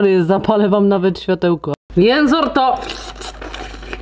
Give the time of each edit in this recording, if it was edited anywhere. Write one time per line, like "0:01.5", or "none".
0:01.7